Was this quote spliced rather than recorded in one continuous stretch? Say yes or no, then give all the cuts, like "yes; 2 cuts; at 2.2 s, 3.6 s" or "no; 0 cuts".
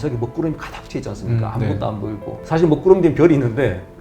no; 0 cuts